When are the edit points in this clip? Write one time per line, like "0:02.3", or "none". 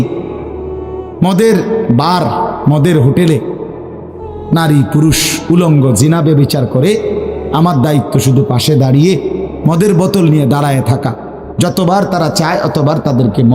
none